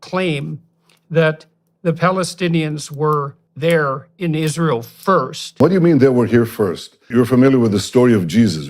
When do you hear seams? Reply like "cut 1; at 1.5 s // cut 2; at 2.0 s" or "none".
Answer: cut 1; at 3.4 s // cut 2; at 5.6 s // cut 3; at 7.0 s